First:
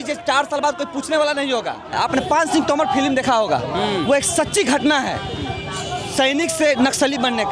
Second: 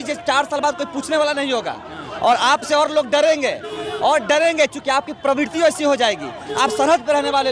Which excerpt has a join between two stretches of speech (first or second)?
first